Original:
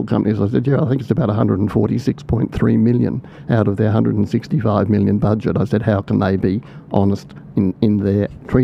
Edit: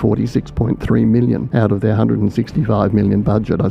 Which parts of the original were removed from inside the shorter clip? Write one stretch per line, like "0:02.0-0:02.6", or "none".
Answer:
0:03.2-0:03.4